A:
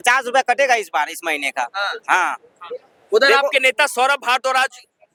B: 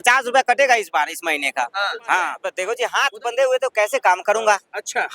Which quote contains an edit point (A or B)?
B